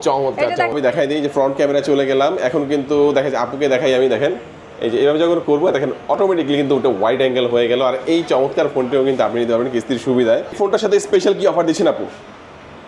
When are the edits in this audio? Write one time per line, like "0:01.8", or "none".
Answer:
0:00.7
0:10.6